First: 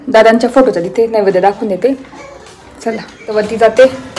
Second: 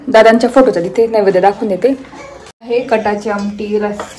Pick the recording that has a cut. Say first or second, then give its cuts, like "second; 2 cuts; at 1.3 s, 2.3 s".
second; 1 cut; at 2.7 s